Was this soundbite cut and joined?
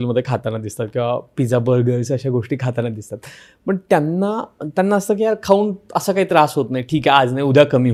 no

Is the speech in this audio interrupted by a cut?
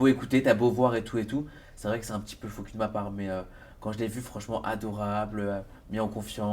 no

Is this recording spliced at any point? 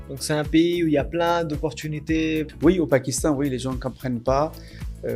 yes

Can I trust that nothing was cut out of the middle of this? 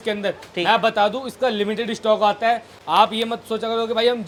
yes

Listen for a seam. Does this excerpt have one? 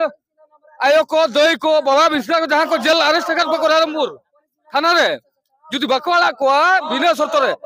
no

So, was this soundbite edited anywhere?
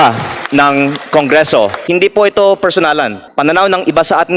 yes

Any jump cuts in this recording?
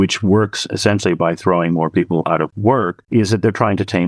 yes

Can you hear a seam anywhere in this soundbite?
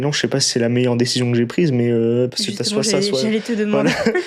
no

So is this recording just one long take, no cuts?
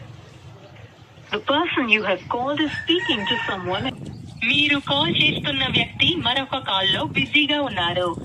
no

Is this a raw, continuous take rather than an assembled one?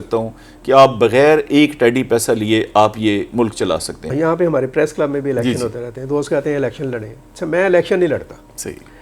no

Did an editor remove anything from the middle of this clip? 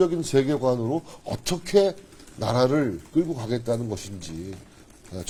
no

